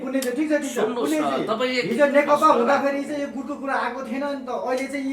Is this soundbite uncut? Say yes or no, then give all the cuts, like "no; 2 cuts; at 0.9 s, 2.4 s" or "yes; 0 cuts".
yes; 0 cuts